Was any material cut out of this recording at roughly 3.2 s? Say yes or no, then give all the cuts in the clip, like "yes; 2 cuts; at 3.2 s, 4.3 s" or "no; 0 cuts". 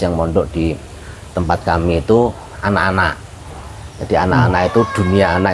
no; 0 cuts